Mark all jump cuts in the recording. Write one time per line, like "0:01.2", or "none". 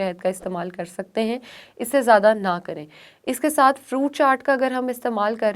none